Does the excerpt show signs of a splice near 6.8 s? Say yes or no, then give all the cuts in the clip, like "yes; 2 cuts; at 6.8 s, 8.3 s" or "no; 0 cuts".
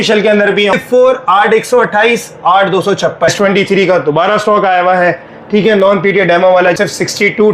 yes; 3 cuts; at 0.7 s, 3.3 s, 6.8 s